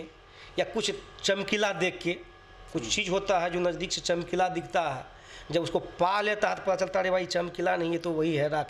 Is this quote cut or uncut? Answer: uncut